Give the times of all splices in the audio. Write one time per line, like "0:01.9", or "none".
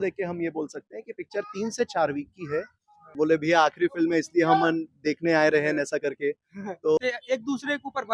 0:03.1
0:07.0